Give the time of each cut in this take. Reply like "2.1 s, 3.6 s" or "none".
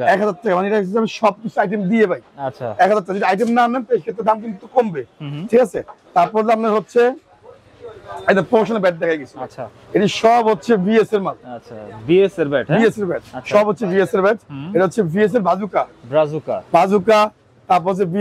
none